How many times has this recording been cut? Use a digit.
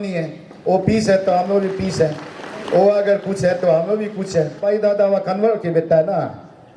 1